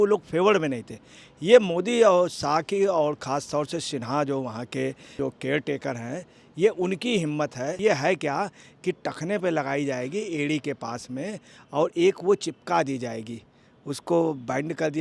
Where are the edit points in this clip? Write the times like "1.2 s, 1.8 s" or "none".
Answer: 5.1 s, 7.8 s